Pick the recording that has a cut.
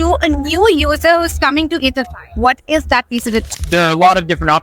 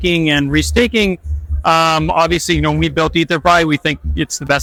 first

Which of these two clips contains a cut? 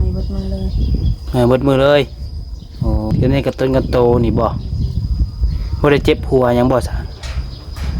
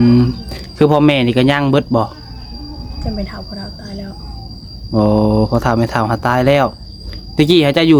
first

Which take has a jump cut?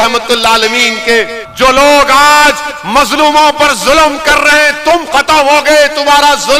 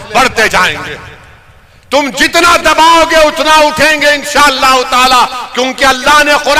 first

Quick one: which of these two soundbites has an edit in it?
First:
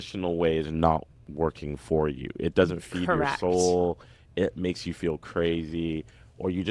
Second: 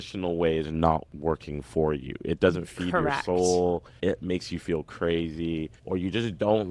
second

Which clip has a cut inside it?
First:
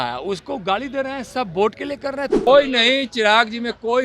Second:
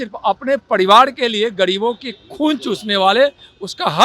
first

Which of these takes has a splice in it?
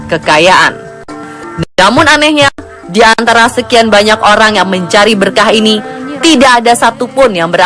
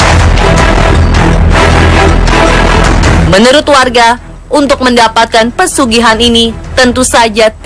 first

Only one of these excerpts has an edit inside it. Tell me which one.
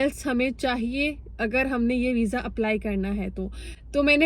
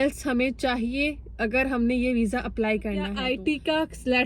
second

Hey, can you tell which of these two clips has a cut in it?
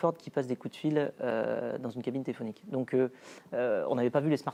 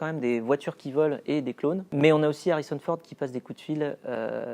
second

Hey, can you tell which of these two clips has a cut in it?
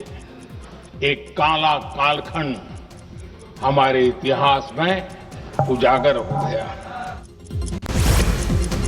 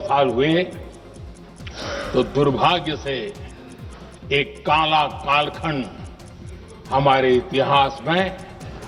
first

